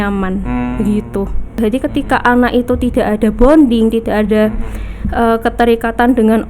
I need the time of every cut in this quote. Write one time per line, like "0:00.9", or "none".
0:01.6